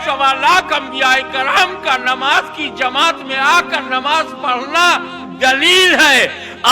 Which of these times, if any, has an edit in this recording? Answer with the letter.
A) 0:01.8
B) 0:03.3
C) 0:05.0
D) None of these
D